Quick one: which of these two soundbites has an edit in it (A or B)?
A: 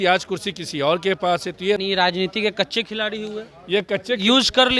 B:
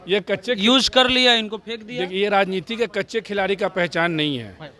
A